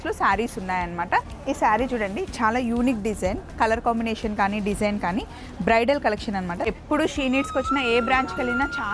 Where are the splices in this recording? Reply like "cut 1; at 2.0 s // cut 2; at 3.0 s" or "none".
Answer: cut 1; at 1.3 s // cut 2; at 6.6 s